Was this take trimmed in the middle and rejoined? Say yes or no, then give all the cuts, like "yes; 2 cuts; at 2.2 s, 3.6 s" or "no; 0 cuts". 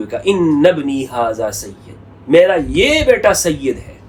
no; 0 cuts